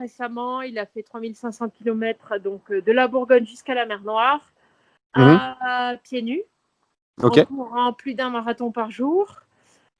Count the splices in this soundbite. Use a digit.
0